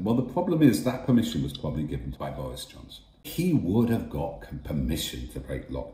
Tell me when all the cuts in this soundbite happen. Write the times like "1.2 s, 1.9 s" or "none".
2.2 s, 3.3 s

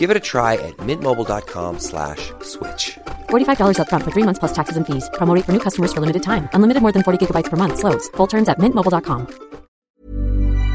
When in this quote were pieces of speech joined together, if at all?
9.8 s

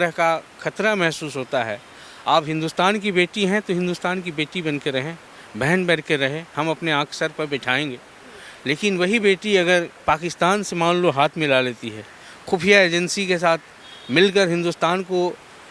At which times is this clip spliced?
none

